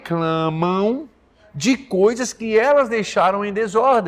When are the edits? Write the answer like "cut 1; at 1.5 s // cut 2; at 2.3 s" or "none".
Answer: none

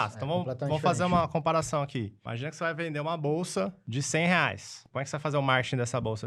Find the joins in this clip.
cut 1; at 2.2 s // cut 2; at 3.9 s // cut 3; at 4.9 s

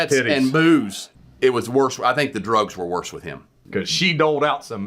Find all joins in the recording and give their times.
cut 1; at 1.0 s // cut 2; at 3.6 s

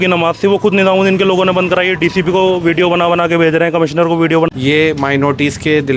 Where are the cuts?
cut 1; at 4.5 s

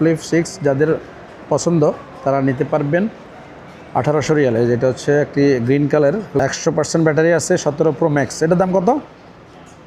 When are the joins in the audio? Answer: cut 1; at 6.4 s

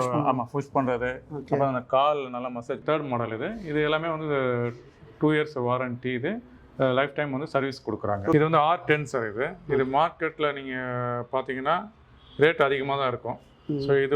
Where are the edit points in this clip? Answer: cut 1; at 2.8 s // cut 2; at 8.3 s

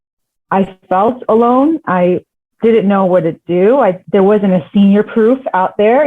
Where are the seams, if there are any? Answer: cut 1; at 4.0 s

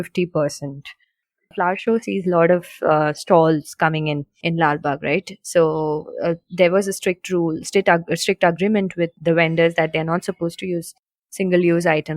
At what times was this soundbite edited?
cut 1; at 1.5 s // cut 2; at 4.3 s // cut 3; at 9.2 s

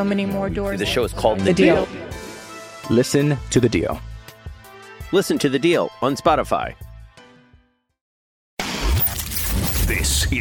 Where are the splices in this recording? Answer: cut 1; at 8.5 s

